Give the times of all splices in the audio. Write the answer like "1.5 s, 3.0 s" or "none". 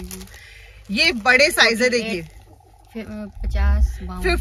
none

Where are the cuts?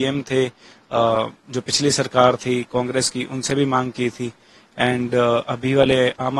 none

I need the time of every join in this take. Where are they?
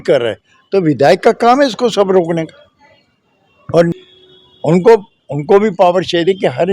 3.9 s

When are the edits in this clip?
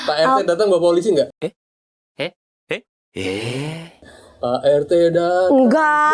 none

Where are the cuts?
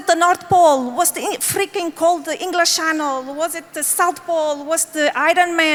none

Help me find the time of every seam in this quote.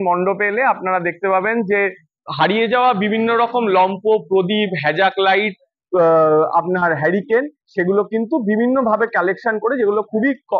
none

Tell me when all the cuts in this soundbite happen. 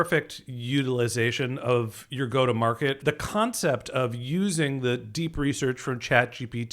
3.0 s

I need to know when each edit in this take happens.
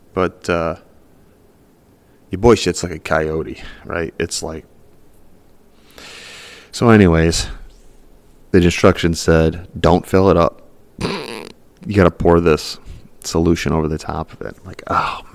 none

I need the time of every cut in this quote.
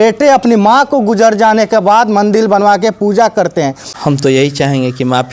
3.9 s

